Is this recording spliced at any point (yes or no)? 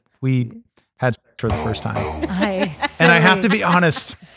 no